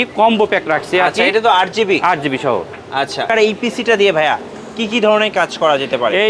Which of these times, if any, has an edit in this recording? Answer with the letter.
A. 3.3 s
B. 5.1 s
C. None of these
A